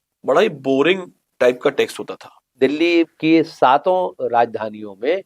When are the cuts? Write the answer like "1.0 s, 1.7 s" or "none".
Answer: 2.4 s